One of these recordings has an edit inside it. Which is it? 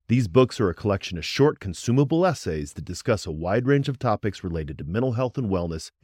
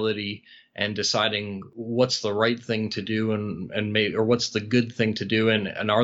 second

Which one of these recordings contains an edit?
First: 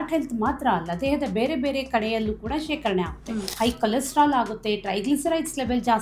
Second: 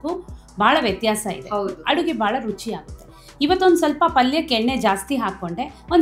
first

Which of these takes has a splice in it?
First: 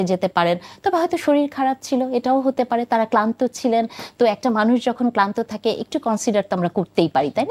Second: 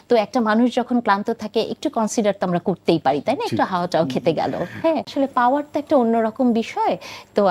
second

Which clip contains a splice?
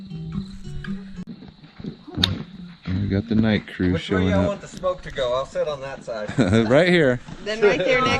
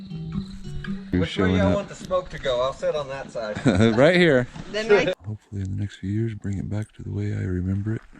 second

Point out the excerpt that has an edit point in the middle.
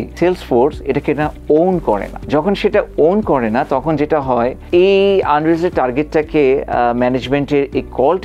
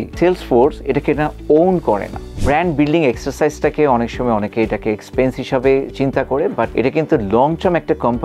second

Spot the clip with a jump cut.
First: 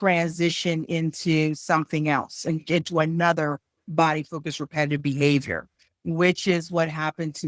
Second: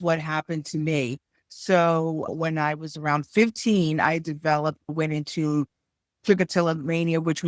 second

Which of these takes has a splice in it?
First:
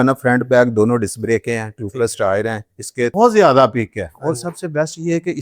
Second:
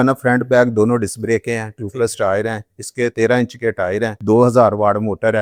first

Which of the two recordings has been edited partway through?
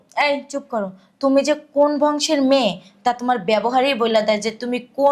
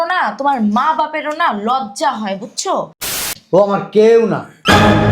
second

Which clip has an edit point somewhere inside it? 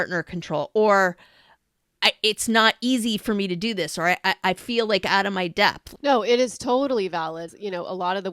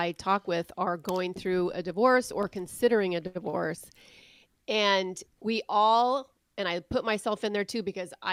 first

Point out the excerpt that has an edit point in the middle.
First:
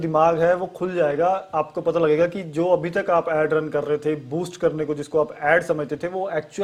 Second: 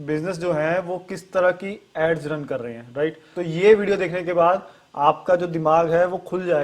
second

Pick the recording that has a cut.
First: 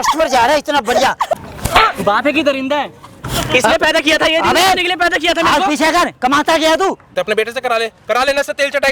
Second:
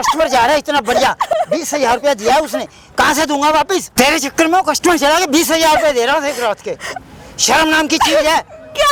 first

